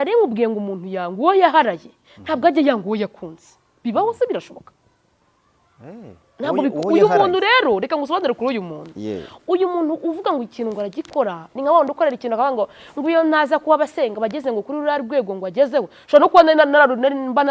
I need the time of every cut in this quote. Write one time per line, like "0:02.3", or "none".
none